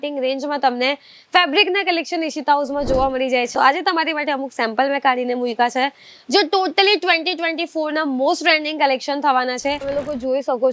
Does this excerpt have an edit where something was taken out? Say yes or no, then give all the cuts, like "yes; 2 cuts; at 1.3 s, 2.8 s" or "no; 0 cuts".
yes; 2 cuts; at 3.5 s, 9.8 s